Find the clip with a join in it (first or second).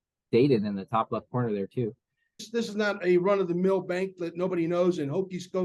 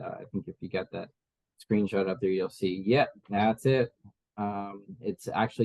first